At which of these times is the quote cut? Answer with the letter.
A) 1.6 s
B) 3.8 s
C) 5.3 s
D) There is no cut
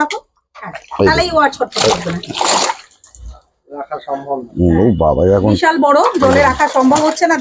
D